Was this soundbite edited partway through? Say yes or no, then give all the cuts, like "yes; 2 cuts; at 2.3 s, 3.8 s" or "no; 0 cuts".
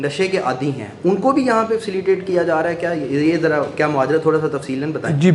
no; 0 cuts